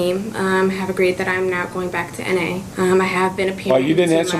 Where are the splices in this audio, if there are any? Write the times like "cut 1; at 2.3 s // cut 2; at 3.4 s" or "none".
cut 1; at 2.7 s